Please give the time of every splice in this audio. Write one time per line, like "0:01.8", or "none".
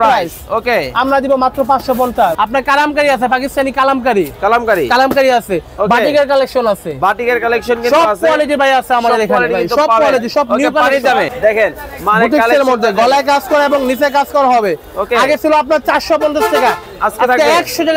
0:02.3
0:11.3

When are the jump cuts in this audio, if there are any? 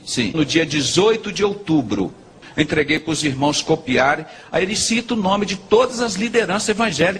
0:02.4

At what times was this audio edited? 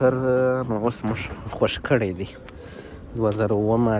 none

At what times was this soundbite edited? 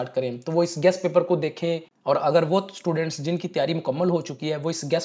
0:01.9

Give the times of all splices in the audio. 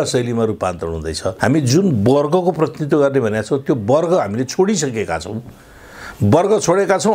none

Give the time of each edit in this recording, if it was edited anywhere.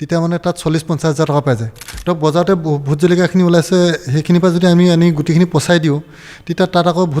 0:01.7

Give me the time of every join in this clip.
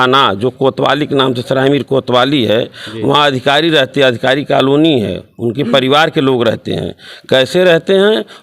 none

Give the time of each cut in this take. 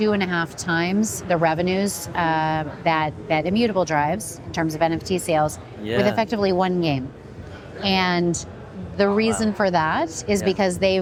none

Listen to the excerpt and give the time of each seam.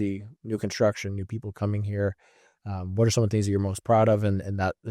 none

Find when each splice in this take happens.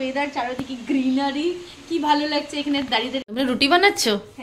0:03.2

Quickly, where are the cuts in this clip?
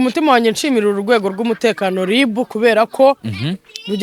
none

